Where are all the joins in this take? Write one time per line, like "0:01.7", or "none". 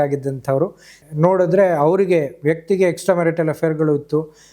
0:01.0